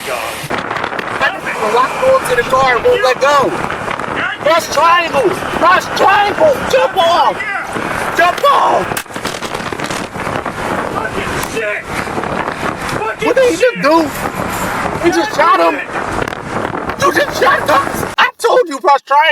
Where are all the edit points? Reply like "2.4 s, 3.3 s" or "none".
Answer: 8.9 s, 18.1 s